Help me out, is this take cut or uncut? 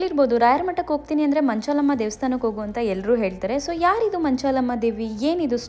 uncut